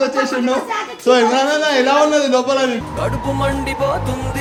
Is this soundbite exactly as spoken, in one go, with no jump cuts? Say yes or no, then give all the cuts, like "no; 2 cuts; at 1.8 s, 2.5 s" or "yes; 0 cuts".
yes; 0 cuts